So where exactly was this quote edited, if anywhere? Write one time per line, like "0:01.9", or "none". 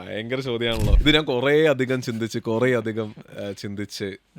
0:00.9

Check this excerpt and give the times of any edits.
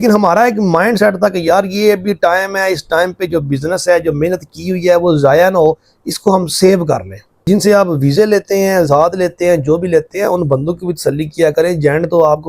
0:07.4

